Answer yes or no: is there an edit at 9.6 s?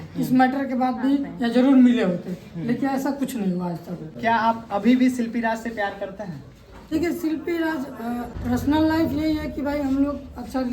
no